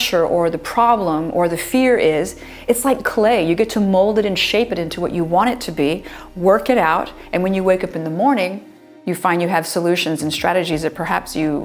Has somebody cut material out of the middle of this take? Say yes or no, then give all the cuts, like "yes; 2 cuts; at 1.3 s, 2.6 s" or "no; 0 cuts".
no; 0 cuts